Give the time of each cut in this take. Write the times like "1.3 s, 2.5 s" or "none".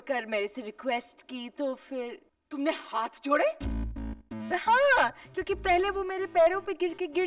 none